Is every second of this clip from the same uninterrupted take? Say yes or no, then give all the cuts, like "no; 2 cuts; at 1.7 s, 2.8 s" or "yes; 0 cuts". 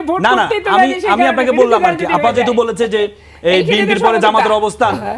yes; 0 cuts